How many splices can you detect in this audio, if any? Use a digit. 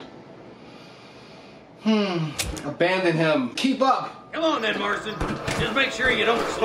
1